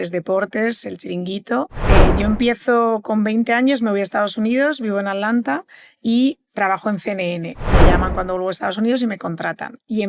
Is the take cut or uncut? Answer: cut